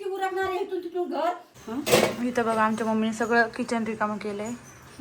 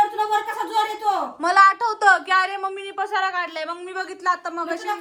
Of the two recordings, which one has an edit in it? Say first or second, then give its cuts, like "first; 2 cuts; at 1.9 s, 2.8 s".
first; 1 cut; at 1.5 s